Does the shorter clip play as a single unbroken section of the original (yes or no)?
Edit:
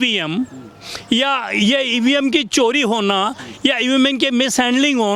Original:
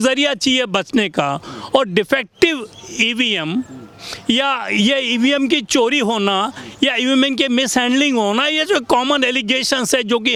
yes